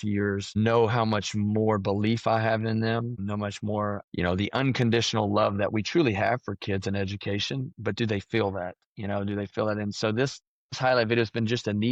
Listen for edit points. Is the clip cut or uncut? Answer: uncut